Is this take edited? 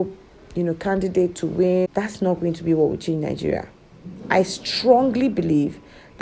yes; 1 cut; at 1.9 s

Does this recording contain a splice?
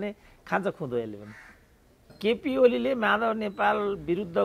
yes; 1 cut; at 2.1 s

